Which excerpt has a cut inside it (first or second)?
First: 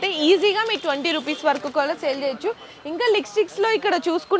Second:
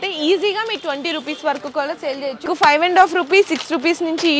second